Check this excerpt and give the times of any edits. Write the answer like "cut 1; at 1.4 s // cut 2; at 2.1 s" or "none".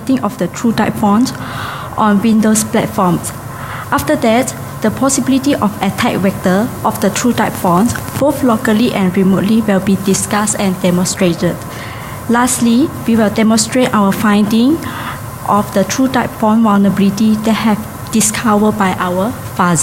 cut 1; at 2.4 s